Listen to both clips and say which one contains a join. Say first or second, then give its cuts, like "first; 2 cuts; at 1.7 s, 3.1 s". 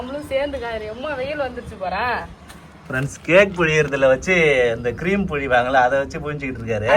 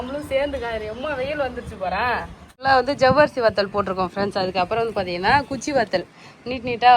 second; 1 cut; at 2.5 s